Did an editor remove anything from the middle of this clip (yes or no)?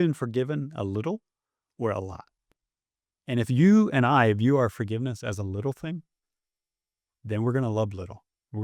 no